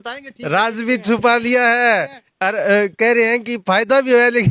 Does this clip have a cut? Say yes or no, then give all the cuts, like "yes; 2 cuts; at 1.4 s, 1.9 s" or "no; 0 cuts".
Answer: no; 0 cuts